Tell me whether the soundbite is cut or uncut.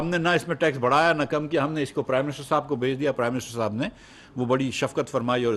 uncut